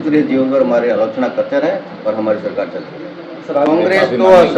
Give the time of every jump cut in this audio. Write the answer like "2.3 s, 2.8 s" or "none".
3.7 s